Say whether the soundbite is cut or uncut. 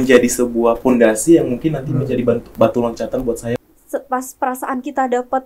cut